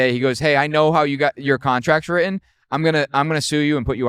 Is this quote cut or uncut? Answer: uncut